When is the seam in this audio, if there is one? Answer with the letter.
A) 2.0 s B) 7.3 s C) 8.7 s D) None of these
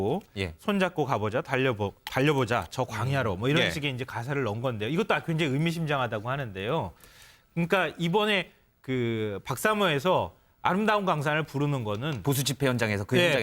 B